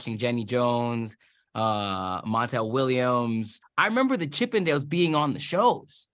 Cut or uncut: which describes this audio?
cut